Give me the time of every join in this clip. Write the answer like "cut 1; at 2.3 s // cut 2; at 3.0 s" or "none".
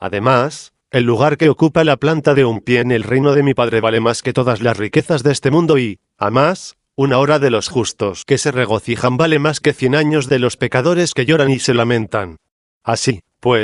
none